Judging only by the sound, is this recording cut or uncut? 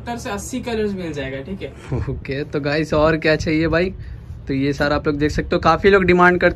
uncut